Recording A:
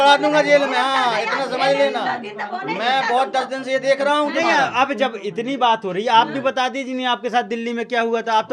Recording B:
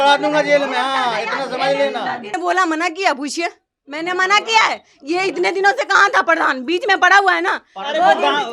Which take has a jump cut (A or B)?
B